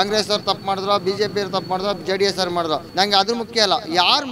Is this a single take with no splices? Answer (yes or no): no